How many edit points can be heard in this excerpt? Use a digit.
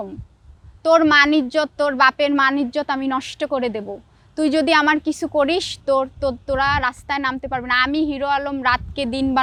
0